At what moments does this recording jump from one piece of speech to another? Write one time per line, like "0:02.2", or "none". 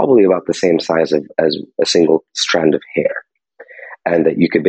none